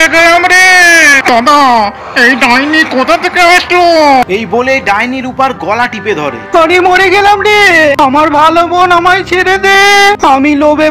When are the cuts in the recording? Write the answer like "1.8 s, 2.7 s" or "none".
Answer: 4.2 s